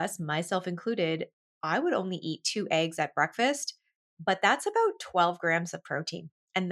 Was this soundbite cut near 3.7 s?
no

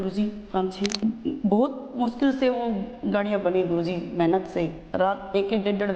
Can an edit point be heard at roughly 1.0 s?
yes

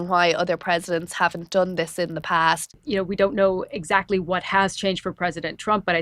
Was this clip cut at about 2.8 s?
yes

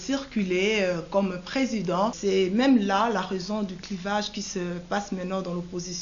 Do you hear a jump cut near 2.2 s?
yes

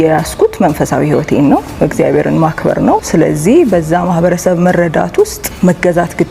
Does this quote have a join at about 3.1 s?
yes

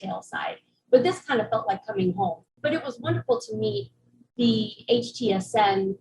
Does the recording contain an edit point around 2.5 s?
yes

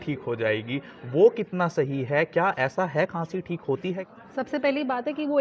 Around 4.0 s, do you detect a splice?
yes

